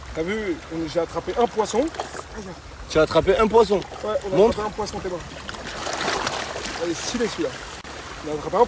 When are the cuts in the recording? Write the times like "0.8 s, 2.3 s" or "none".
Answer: 7.4 s